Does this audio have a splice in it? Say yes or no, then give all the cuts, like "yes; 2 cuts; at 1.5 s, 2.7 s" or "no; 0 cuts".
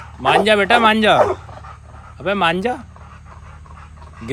no; 0 cuts